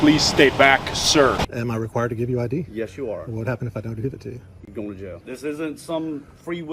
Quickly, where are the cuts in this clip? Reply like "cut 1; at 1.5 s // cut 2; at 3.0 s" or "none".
cut 1; at 1.4 s // cut 2; at 5.2 s